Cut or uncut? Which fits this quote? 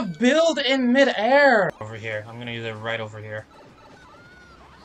cut